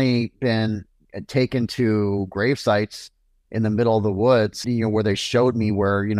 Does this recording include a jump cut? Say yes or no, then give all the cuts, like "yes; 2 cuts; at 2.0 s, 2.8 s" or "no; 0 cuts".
yes; 1 cut; at 4.6 s